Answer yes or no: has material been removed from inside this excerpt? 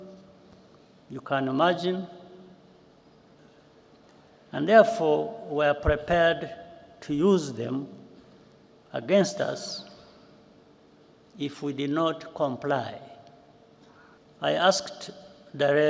yes